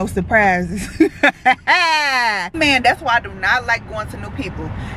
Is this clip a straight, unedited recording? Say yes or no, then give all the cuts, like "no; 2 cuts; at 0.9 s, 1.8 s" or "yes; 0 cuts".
no; 1 cut; at 2.6 s